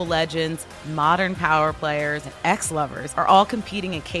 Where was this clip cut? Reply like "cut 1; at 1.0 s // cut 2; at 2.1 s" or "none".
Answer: cut 1; at 2.3 s // cut 2; at 3.0 s